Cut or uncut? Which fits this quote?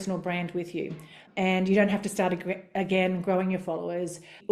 uncut